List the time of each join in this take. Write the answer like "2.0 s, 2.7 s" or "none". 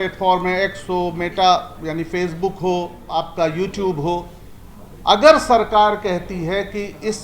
3.0 s